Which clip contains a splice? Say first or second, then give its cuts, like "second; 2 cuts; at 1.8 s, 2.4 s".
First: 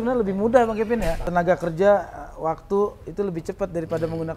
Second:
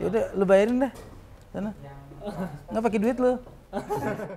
first; 1 cut; at 1.2 s